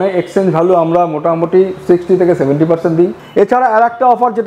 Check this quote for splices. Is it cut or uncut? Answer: cut